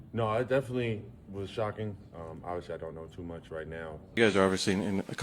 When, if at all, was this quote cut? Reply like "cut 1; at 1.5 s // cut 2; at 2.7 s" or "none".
cut 1; at 4.2 s